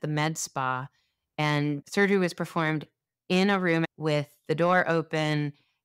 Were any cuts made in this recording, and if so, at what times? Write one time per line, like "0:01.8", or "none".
0:01.8
0:03.9